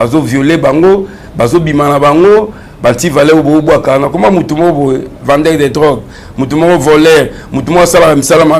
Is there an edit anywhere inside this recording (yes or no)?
no